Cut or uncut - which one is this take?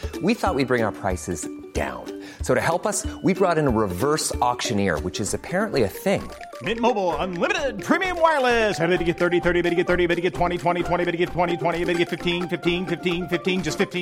uncut